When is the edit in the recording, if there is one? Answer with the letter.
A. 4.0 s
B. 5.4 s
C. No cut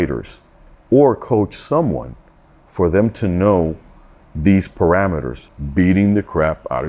B